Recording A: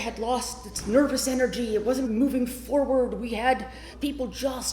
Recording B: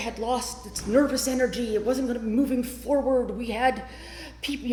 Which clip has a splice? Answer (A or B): A